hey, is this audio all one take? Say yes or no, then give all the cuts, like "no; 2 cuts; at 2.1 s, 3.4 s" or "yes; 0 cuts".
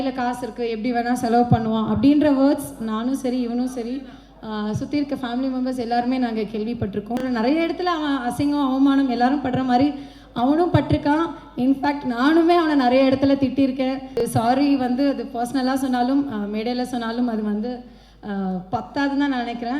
no; 2 cuts; at 7.2 s, 14.3 s